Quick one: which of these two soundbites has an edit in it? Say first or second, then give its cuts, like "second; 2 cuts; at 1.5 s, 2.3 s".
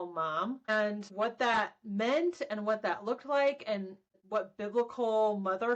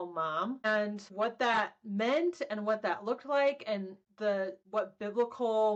first; 1 cut; at 4.1 s